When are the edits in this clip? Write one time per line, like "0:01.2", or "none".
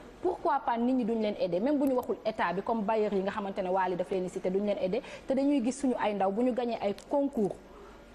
0:01.0